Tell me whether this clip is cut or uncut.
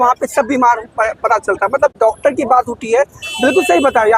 uncut